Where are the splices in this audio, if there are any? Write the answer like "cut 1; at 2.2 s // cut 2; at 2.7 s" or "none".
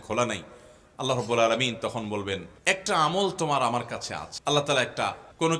none

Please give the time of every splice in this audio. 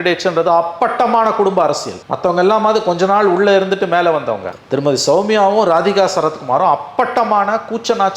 none

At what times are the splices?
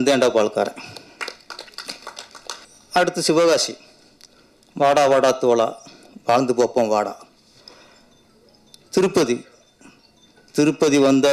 cut 1; at 2.7 s

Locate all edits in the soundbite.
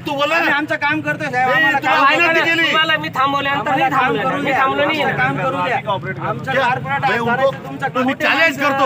cut 1; at 7.9 s

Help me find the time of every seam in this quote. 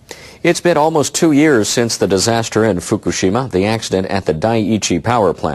cut 1; at 3.1 s

